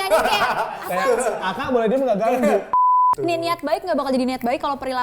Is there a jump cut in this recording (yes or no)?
yes